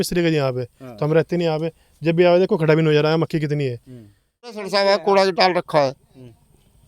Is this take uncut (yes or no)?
no